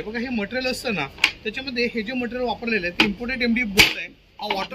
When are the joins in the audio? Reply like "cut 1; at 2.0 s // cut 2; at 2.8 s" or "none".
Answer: none